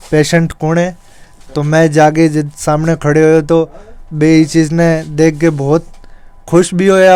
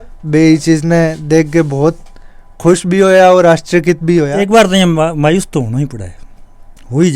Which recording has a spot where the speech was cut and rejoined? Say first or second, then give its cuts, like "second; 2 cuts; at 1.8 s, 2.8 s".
second; 1 cut; at 4.3 s